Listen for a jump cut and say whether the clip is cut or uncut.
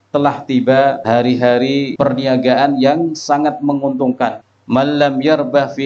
cut